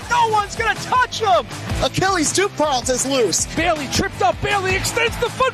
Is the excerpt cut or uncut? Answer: uncut